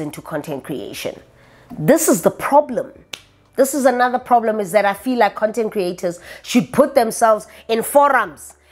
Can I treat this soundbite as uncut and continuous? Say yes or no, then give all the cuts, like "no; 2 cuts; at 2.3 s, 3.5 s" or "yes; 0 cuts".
yes; 0 cuts